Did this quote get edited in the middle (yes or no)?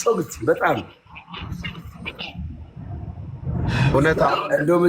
yes